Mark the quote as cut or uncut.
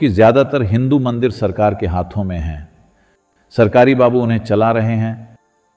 uncut